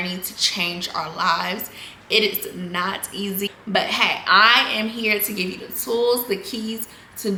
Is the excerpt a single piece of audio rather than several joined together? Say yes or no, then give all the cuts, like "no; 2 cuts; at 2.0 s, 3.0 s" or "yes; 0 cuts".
yes; 0 cuts